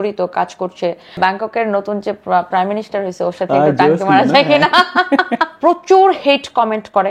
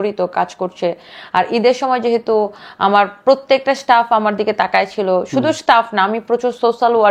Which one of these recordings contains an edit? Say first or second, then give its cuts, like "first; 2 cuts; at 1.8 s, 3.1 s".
first; 2 cuts; at 1.1 s, 5.4 s